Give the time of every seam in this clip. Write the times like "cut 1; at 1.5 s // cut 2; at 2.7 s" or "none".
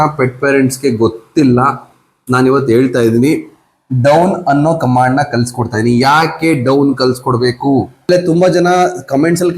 cut 1; at 8.1 s